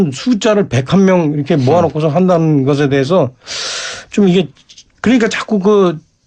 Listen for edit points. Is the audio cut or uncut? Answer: cut